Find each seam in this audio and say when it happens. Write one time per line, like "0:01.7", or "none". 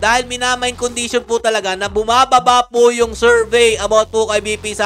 none